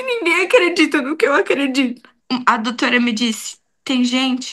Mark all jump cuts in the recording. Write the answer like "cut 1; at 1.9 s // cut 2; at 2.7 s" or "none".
cut 1; at 2.1 s